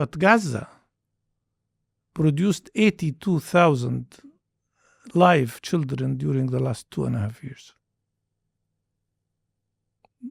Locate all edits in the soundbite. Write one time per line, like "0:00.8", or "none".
none